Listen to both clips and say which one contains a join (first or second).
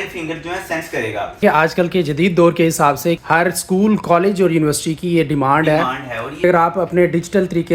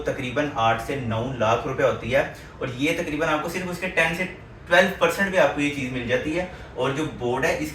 first